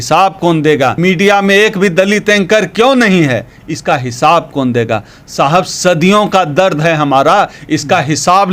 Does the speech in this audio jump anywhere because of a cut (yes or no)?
yes